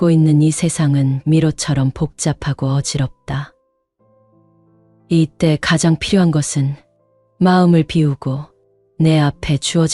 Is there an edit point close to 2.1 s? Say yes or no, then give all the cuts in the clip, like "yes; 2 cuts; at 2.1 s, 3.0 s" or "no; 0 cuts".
no; 0 cuts